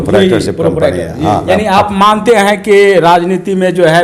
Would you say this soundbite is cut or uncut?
uncut